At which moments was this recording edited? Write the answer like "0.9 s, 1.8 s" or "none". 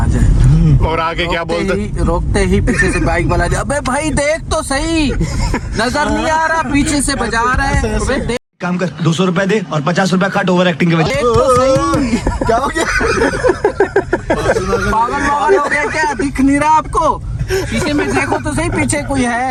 none